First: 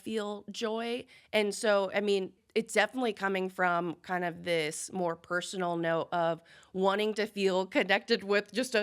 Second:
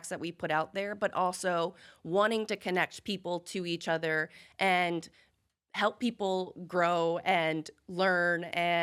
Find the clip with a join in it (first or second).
first